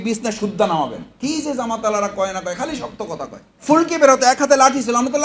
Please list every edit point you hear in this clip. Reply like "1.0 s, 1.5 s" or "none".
1.1 s, 3.5 s